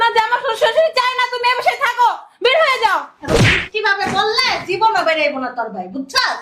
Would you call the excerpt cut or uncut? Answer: cut